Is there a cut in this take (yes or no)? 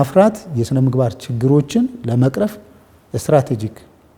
no